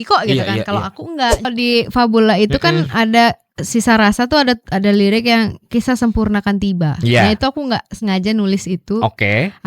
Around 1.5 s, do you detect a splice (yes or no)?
yes